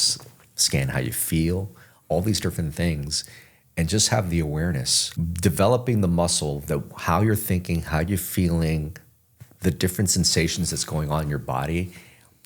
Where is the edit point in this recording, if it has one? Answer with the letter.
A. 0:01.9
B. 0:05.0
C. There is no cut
B